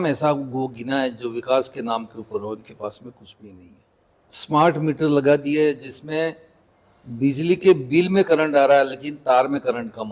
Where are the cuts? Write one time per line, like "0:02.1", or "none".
0:03.6